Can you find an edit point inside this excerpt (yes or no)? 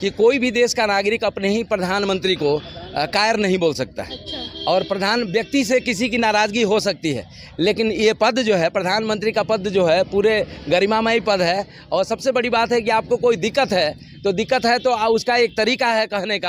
no